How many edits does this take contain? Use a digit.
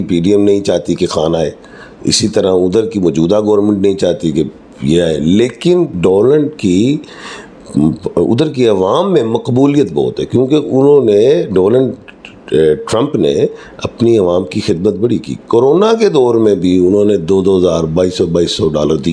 0